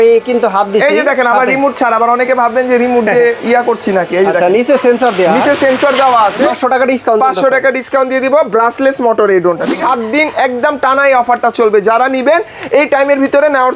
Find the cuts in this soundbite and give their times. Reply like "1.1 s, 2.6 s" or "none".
6.5 s, 9.7 s